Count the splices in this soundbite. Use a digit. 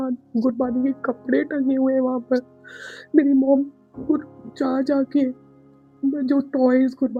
0